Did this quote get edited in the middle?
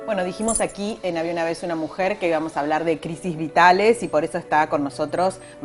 no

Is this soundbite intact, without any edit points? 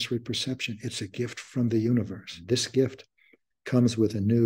no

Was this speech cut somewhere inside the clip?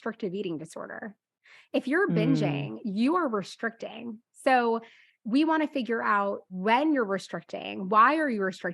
yes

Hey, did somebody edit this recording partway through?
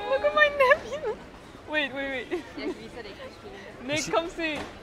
no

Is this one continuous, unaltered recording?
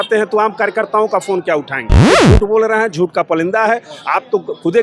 no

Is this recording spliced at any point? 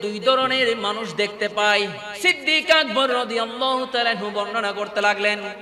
yes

